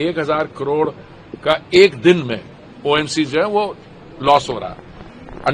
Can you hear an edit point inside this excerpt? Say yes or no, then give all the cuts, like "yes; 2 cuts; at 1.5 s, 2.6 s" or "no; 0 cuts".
no; 0 cuts